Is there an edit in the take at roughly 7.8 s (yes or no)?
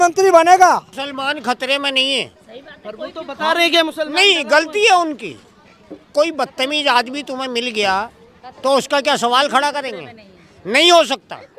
no